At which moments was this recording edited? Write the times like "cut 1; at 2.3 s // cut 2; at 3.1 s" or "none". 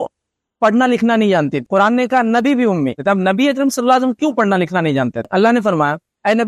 cut 1; at 1.6 s // cut 2; at 3.0 s // cut 3; at 5.2 s